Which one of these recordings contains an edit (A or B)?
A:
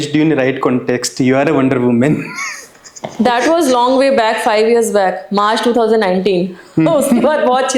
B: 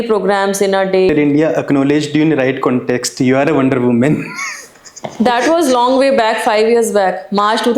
B